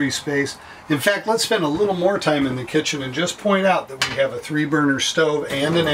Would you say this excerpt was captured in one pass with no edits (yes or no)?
no